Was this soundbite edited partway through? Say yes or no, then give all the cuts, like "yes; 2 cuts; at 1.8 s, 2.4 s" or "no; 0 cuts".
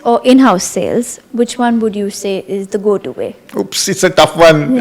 no; 0 cuts